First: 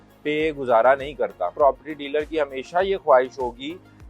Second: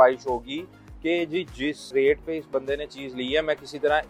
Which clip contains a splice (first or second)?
first